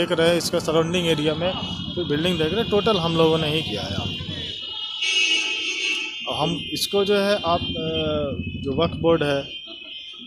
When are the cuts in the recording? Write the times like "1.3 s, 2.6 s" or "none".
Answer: none